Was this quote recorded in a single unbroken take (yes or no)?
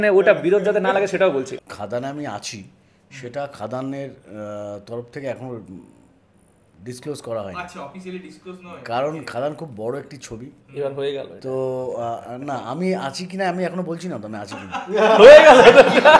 no